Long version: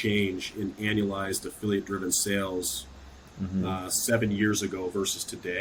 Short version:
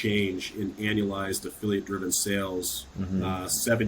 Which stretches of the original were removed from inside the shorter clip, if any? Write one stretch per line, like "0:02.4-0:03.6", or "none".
0:02.8-0:03.2